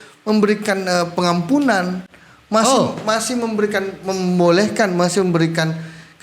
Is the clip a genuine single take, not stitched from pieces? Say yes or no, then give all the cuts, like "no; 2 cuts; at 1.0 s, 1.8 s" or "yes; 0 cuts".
yes; 0 cuts